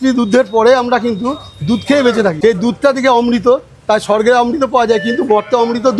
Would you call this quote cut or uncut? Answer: cut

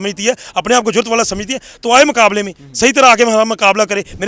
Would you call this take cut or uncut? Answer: uncut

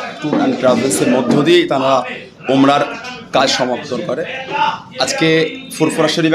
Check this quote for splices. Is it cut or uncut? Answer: uncut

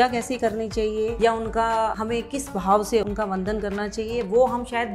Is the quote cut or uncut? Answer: cut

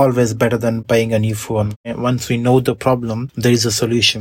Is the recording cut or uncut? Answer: cut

